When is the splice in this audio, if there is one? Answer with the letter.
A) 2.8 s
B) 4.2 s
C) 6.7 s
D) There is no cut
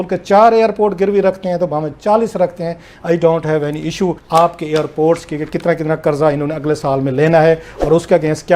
B